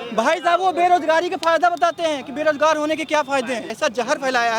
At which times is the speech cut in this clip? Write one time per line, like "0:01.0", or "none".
0:03.7